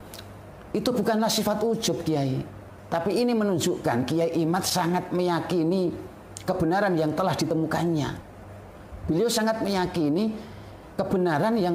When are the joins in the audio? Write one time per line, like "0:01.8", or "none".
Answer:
none